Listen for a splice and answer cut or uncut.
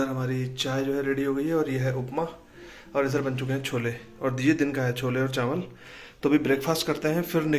uncut